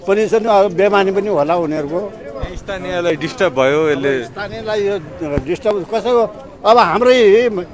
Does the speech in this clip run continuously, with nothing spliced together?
yes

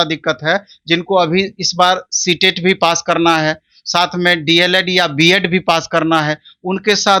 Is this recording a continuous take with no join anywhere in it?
yes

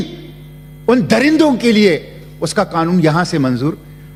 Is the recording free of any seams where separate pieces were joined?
yes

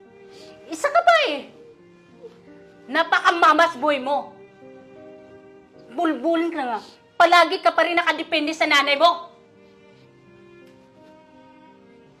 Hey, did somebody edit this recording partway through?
yes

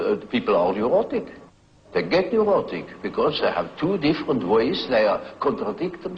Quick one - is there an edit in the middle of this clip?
yes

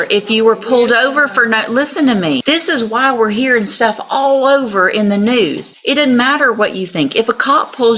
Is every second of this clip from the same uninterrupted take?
no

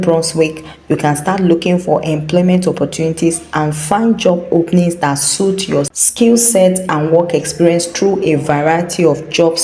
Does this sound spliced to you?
yes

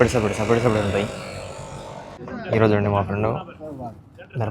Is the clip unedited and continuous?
no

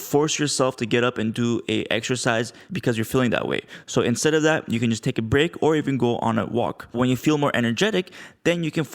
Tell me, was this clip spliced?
yes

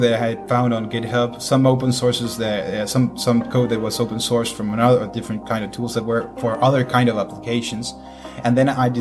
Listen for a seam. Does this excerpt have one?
no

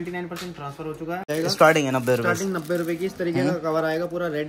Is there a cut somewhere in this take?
yes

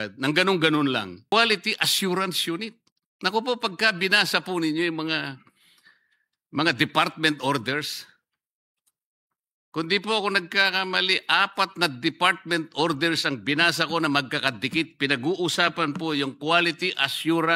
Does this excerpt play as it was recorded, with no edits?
no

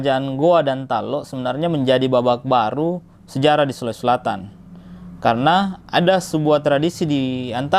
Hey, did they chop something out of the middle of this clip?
no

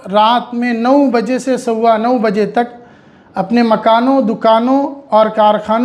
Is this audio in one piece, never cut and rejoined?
yes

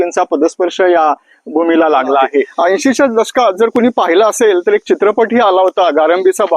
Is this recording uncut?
no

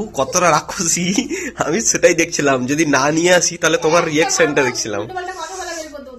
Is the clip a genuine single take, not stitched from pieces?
yes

